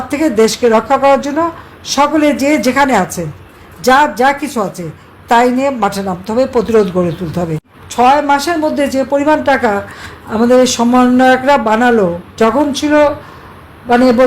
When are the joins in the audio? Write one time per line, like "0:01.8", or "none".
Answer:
0:07.8
0:12.3